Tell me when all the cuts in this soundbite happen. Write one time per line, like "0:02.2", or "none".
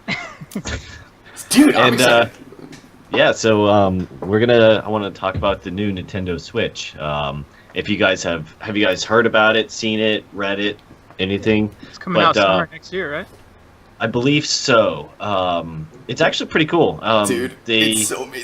0:03.9